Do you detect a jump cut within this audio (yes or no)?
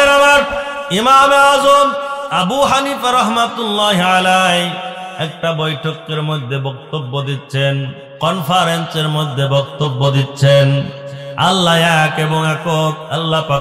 yes